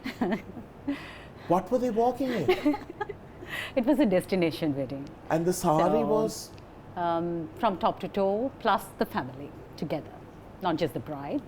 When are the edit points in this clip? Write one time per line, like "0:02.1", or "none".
none